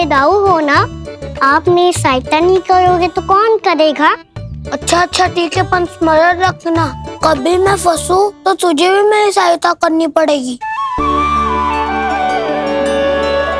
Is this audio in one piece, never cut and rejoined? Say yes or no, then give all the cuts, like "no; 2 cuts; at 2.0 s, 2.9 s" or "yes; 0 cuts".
yes; 0 cuts